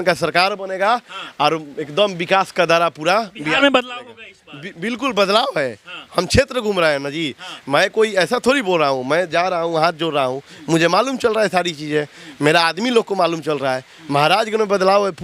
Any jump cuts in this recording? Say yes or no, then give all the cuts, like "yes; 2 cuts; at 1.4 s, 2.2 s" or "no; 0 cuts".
no; 0 cuts